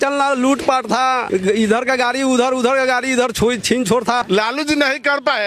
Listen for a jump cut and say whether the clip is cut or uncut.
cut